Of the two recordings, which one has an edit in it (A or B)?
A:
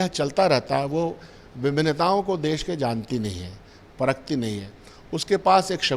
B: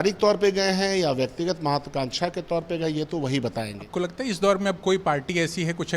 B